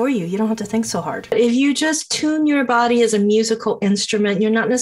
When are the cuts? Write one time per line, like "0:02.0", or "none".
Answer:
0:01.3